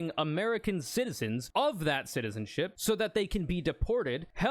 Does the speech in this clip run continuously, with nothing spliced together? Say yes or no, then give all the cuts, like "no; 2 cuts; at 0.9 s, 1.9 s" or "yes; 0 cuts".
no; 2 cuts; at 1.5 s, 2.8 s